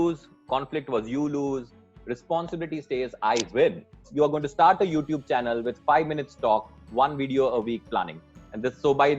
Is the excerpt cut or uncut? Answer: cut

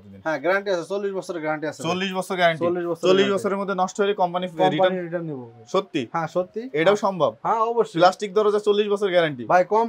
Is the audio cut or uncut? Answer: uncut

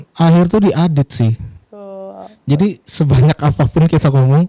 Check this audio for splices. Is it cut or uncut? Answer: uncut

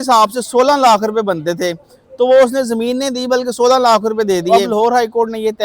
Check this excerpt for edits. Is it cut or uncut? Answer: cut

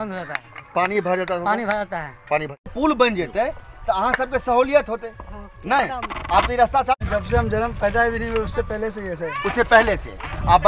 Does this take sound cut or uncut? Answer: cut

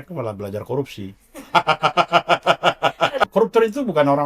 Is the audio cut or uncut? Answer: cut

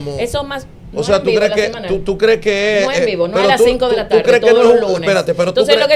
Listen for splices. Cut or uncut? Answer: uncut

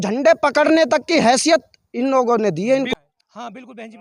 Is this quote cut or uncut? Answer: cut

